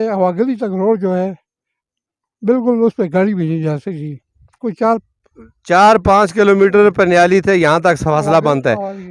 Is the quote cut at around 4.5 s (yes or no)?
yes